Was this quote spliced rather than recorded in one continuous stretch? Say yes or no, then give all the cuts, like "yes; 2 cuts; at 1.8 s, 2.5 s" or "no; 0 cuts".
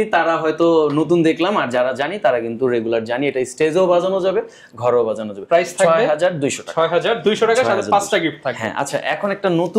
no; 0 cuts